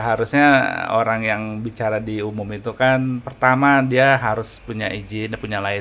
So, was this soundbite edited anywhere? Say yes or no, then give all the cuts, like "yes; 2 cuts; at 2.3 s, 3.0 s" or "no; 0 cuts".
no; 0 cuts